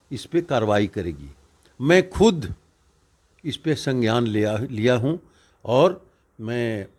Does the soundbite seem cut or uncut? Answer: uncut